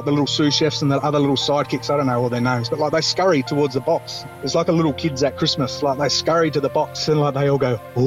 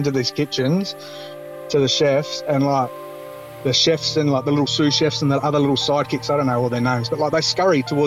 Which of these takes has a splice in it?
first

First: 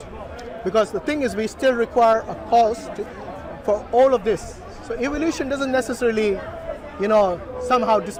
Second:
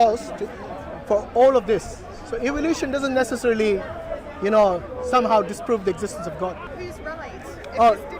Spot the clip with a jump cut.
second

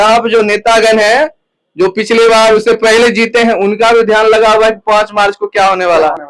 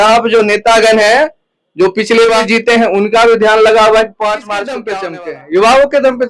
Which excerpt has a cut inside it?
second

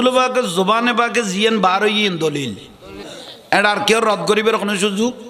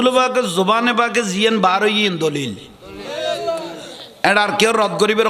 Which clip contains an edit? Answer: first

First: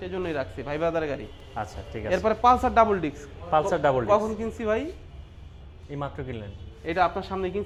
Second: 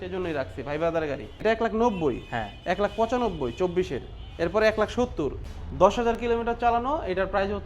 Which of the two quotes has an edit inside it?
second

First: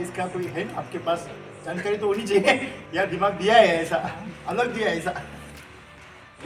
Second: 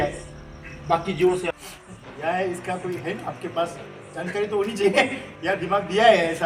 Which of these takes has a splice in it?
second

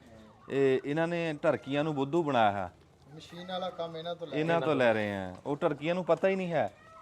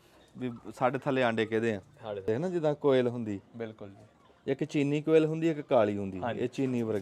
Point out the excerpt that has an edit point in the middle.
second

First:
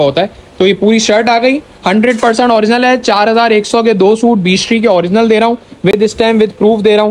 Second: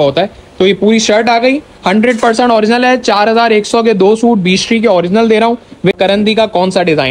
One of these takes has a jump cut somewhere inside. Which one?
second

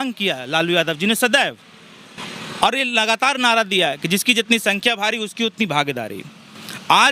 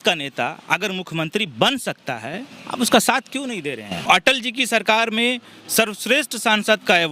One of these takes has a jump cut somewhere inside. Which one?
second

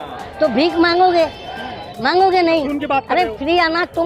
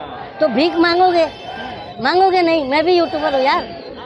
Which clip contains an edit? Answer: first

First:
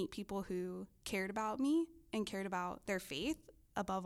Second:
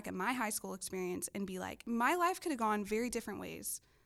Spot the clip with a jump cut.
second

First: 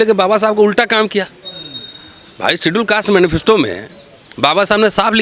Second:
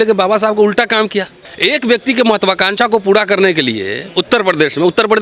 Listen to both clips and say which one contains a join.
second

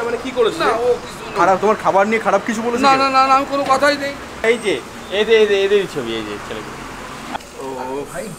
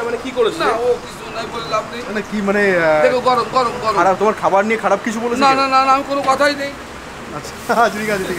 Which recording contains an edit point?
first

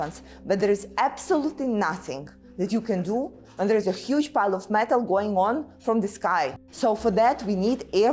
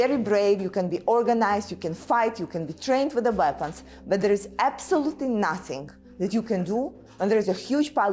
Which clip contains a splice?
first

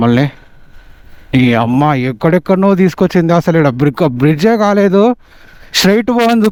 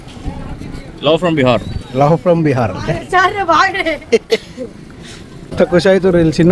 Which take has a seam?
second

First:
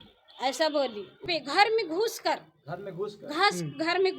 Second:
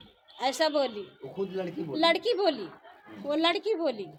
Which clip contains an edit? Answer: first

